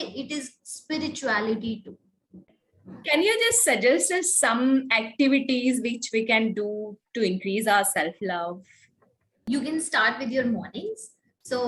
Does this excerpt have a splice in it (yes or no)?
no